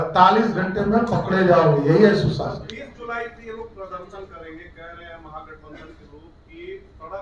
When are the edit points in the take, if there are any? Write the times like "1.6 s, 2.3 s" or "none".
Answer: none